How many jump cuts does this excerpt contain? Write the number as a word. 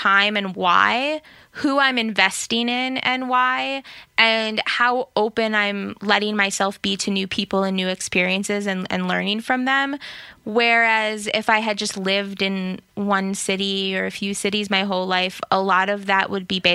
zero